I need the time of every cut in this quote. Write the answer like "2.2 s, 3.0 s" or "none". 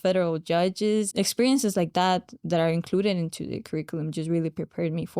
1.1 s